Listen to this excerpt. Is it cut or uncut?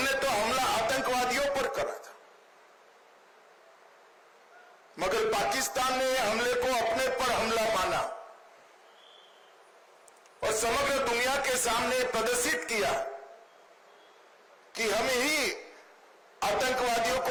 uncut